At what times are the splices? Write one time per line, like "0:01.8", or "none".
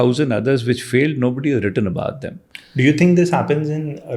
none